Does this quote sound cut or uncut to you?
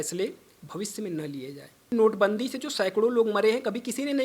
cut